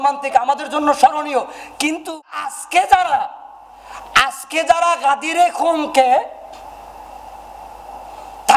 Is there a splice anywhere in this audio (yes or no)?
yes